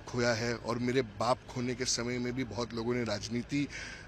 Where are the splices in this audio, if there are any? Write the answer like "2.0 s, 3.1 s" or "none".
none